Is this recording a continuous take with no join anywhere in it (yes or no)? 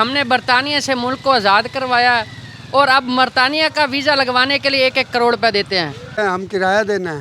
no